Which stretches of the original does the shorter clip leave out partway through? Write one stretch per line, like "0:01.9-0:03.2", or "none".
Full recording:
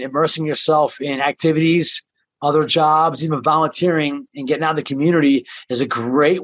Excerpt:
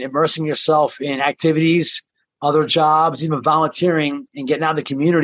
none